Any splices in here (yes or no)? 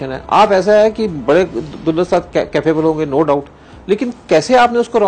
no